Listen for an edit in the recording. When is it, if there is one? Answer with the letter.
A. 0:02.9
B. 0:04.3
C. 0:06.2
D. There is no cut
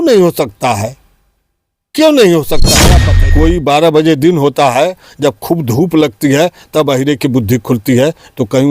A